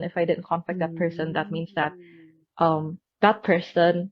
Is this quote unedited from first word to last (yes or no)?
yes